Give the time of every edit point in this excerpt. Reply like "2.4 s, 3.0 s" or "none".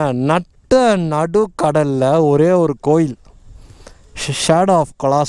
none